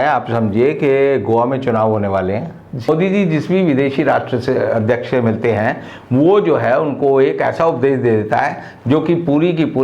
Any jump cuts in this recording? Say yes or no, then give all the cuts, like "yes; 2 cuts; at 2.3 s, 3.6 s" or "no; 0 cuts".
yes; 1 cut; at 2.9 s